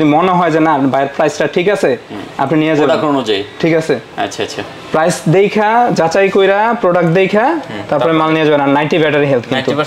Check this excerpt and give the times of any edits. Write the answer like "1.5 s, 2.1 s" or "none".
none